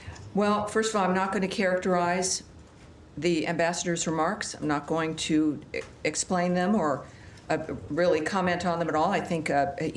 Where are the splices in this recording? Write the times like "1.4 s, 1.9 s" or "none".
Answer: none